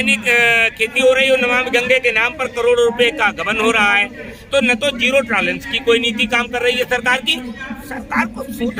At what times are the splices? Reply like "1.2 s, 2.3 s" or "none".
none